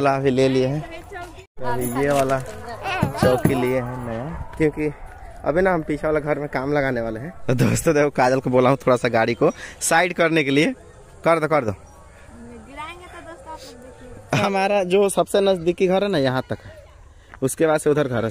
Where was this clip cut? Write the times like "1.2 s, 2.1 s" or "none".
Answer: 4.3 s, 7.3 s, 14.4 s